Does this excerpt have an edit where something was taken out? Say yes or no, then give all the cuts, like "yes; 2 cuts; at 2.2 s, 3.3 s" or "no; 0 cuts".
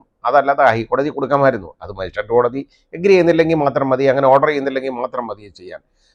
no; 0 cuts